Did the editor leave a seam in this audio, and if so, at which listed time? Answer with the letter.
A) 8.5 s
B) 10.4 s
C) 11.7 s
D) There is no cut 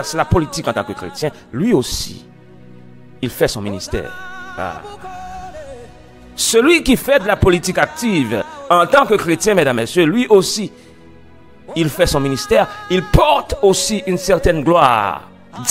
D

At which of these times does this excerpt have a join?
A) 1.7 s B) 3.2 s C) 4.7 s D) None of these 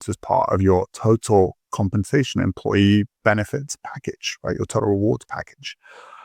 D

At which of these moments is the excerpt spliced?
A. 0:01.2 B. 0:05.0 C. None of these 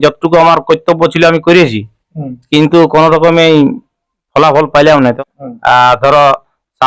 B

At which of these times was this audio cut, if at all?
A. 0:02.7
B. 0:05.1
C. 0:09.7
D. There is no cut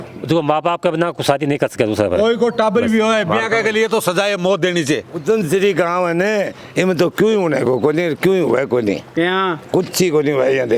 B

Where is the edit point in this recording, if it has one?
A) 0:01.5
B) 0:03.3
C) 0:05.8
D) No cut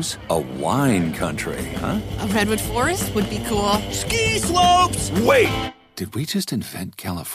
D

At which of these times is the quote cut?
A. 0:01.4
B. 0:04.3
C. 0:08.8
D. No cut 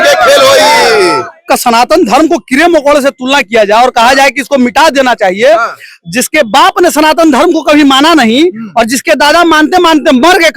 A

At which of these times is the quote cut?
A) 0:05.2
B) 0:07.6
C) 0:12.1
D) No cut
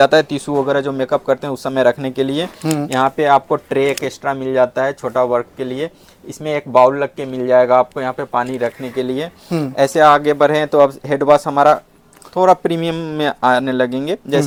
D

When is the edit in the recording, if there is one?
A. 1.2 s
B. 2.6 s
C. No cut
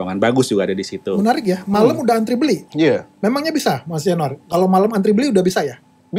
A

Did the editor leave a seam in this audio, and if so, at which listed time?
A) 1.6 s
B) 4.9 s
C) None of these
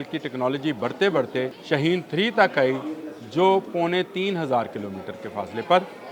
A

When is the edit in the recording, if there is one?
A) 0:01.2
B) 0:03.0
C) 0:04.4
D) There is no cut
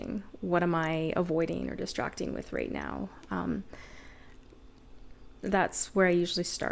D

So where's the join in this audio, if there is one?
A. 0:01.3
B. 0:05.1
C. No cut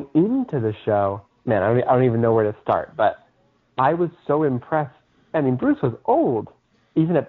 A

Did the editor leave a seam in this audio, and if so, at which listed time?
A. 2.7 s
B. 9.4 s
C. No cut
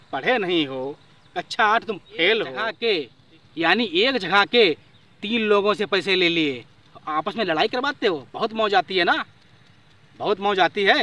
A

